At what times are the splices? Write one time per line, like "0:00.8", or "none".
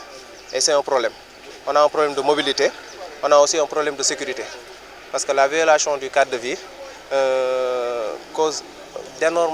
none